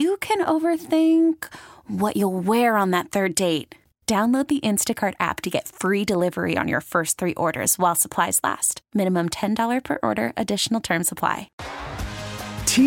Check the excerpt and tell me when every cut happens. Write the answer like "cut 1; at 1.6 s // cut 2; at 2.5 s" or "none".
cut 1; at 11.6 s